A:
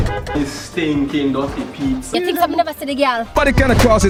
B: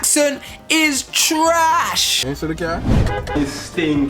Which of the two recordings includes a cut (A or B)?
B